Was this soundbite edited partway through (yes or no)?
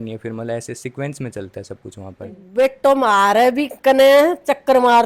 yes